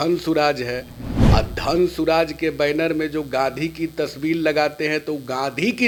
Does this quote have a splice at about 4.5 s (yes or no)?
no